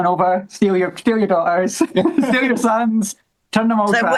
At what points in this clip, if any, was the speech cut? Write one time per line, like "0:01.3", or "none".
none